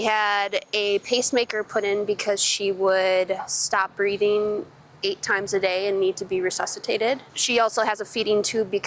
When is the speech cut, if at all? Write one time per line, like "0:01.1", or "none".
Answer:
0:07.3